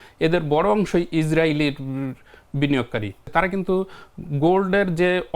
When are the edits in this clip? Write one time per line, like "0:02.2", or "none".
0:03.2